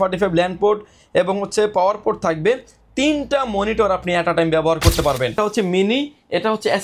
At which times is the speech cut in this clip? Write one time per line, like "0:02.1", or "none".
0:05.4